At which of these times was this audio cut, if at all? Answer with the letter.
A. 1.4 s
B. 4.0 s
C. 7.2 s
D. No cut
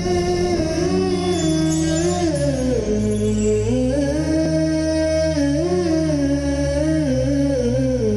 A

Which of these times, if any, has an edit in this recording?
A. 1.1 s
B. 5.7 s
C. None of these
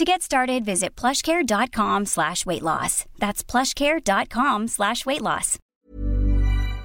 B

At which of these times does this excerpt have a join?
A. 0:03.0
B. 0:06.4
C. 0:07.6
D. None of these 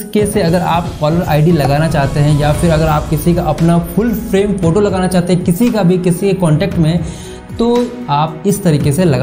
D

